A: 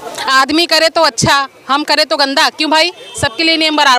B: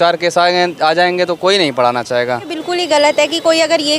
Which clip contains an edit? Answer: B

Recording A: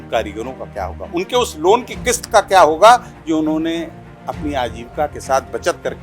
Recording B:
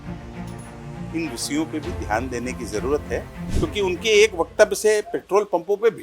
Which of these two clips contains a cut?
B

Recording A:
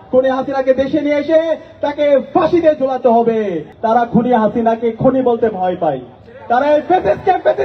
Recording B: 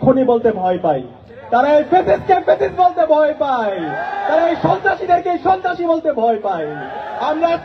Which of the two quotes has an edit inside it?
A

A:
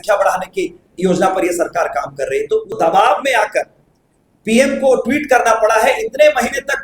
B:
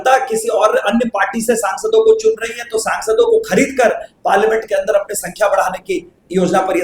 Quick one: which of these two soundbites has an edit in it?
A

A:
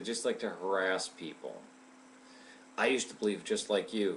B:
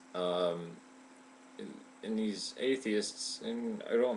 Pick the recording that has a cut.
A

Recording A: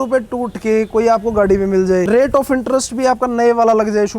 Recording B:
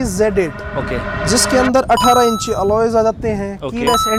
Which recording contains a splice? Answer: A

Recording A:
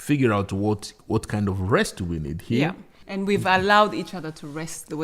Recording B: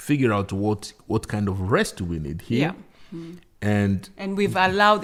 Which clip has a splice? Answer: A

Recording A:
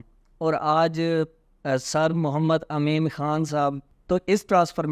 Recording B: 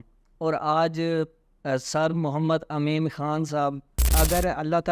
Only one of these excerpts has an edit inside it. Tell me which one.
B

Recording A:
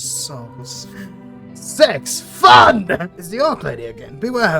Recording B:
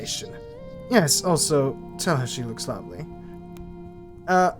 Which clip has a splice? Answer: A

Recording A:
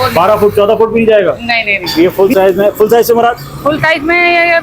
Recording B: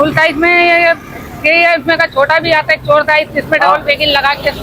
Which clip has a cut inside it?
A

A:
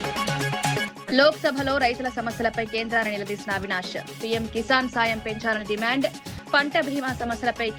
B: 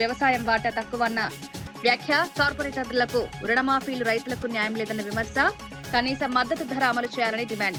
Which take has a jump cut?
A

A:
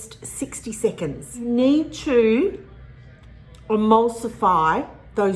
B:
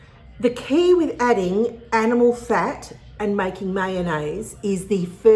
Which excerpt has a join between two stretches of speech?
A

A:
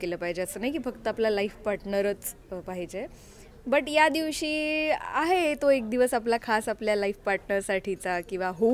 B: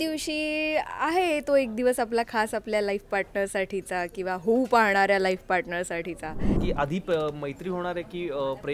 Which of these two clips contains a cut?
B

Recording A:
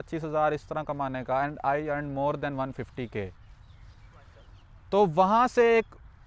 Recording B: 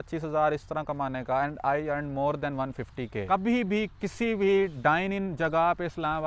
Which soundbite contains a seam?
B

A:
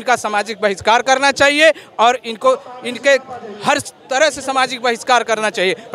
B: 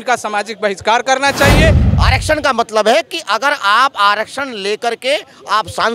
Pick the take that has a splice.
B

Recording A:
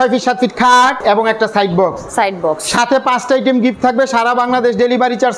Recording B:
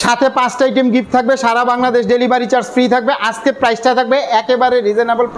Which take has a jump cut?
A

